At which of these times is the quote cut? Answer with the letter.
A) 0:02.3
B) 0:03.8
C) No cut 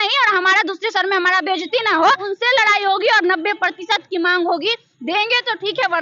A